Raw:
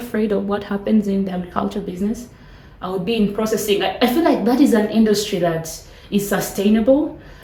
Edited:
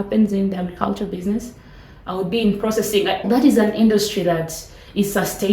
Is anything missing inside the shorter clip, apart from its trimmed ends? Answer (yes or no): yes